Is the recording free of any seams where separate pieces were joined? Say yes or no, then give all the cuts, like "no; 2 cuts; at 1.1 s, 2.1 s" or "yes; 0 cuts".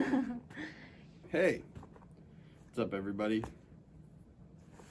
no; 1 cut; at 1.1 s